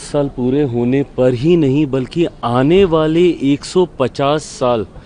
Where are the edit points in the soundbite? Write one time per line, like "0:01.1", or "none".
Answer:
none